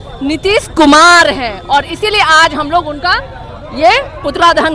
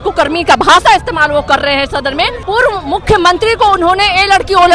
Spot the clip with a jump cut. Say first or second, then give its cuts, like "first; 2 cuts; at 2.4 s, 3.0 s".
second; 1 cut; at 2.4 s